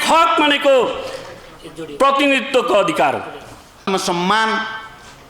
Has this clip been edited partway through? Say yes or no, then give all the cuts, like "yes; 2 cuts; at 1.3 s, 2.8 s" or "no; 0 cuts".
yes; 1 cut; at 3.8 s